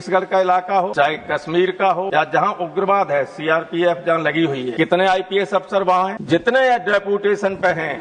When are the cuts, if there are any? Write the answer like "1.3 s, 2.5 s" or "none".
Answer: 0.9 s, 2.1 s, 4.7 s, 6.2 s